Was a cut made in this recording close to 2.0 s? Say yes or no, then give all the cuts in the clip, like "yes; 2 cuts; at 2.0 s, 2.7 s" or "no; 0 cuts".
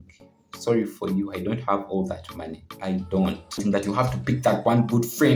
no; 1 cut; at 3.6 s